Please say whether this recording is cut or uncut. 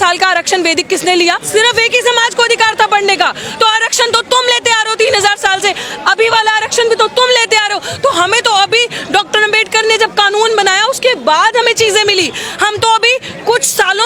uncut